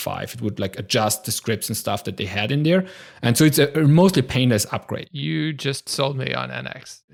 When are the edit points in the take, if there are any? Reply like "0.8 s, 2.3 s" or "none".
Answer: none